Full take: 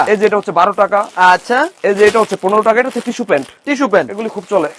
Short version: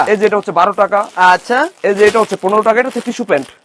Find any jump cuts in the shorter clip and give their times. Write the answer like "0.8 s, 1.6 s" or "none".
none